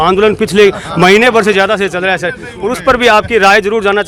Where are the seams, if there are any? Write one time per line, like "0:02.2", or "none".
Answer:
none